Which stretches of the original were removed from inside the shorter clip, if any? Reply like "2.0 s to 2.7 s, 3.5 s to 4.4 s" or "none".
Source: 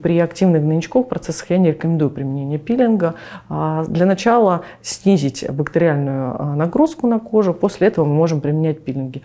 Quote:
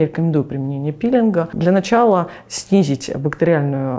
3.2 s to 3.9 s